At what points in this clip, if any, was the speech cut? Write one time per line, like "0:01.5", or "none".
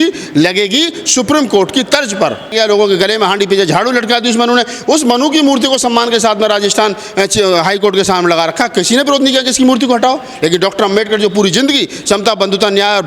0:02.5